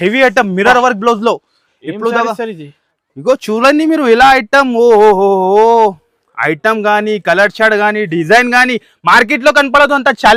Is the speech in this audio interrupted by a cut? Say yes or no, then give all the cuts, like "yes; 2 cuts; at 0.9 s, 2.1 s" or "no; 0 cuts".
no; 0 cuts